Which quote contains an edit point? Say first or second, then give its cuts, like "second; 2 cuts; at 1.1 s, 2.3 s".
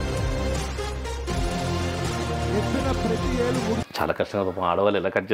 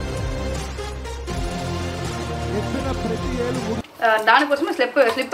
second; 1 cut; at 3.8 s